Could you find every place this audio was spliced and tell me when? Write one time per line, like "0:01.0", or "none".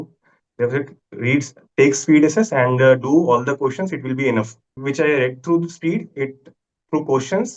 0:04.7

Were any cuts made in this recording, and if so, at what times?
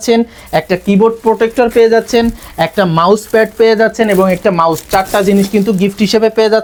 none

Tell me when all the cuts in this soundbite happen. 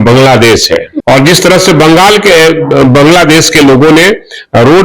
none

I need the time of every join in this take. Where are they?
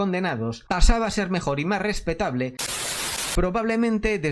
0:02.6

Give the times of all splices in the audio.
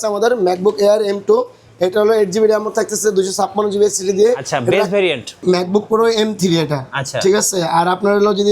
0:05.4

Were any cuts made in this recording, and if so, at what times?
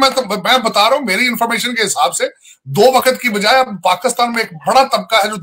none

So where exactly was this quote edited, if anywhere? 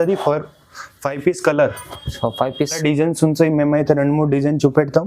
0:02.8

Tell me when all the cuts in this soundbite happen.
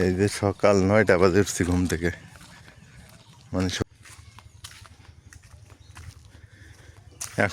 0:03.8

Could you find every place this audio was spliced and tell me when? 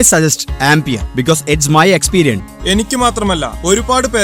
0:02.5

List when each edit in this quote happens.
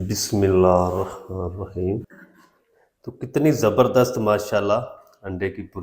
0:02.1

